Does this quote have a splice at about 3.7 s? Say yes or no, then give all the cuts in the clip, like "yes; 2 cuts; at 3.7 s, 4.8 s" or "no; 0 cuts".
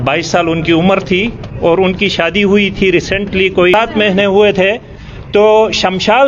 yes; 1 cut; at 3.7 s